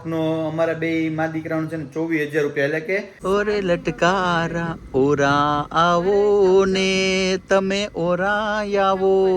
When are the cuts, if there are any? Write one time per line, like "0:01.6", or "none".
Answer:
0:03.1